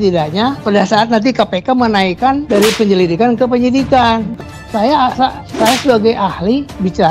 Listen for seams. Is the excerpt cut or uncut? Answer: cut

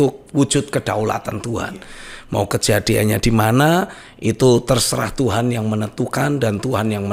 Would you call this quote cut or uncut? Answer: uncut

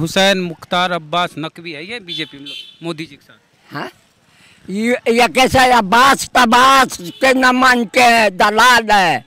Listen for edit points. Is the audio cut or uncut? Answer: uncut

